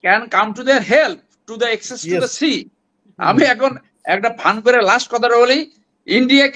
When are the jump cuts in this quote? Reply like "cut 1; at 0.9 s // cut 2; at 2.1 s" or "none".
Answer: none

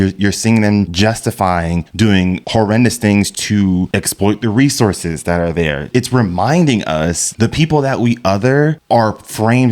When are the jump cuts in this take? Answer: cut 1; at 0.9 s // cut 2; at 2.1 s // cut 3; at 3.9 s // cut 4; at 5.9 s // cut 5; at 7.3 s

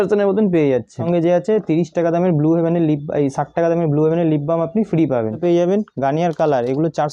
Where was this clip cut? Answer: cut 1; at 1.0 s // cut 2; at 5.4 s

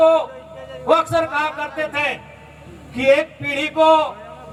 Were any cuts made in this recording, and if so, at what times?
none

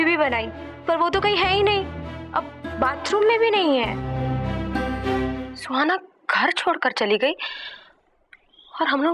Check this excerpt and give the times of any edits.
cut 1; at 5.5 s

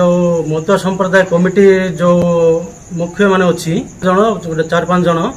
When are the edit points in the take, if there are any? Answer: cut 1; at 4.0 s

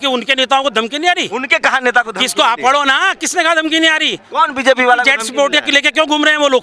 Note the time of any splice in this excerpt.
none

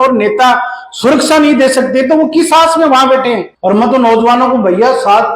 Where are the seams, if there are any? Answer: cut 1; at 3.5 s

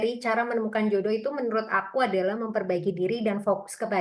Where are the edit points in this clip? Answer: none

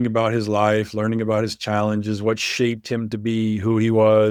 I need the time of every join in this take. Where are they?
none

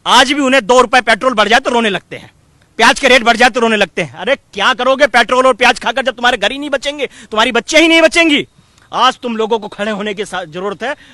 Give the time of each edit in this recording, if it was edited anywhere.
none

